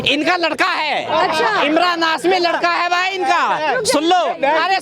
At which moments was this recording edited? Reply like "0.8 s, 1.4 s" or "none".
none